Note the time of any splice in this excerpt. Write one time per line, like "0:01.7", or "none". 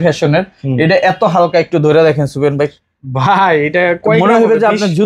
none